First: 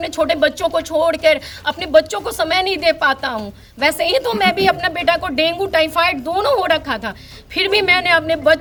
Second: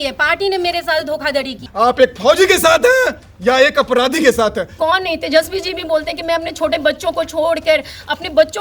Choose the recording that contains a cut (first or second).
second